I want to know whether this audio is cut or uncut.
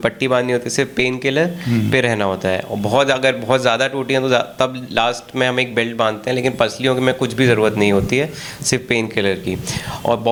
uncut